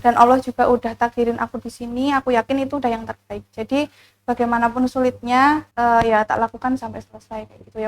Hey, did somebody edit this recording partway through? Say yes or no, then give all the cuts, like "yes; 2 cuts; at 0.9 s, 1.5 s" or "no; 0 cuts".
yes; 1 cut; at 5.7 s